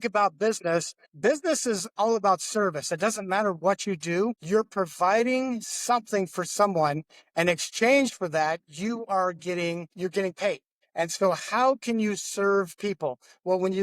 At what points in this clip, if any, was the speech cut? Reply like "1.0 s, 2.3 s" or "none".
1.0 s, 10.8 s